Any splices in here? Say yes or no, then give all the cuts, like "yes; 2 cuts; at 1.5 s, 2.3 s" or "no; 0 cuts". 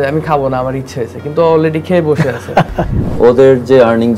yes; 1 cut; at 3.0 s